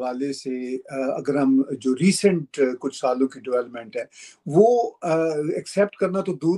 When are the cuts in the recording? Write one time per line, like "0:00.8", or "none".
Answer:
none